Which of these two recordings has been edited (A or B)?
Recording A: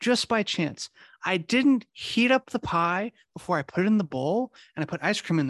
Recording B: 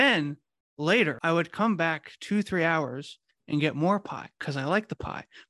B